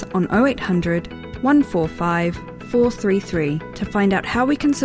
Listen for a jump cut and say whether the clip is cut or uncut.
uncut